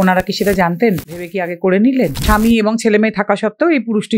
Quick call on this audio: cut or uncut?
cut